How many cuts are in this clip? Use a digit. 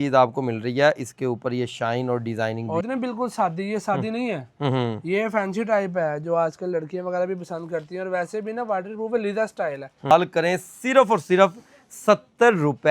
2